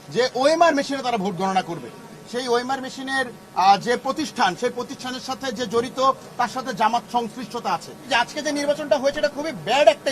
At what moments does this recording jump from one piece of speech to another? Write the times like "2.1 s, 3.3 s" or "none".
2.1 s, 8.0 s